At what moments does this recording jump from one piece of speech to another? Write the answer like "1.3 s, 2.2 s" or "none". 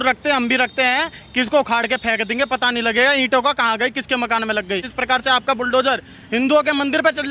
4.9 s